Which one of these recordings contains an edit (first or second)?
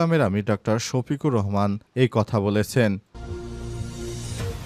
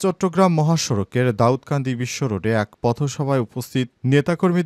first